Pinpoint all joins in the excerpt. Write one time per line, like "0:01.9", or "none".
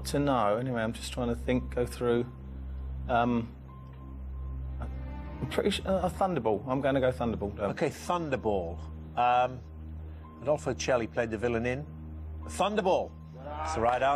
0:02.0